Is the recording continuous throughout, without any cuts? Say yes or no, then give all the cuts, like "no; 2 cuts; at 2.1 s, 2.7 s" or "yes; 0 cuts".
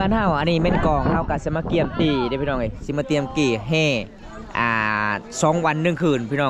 yes; 0 cuts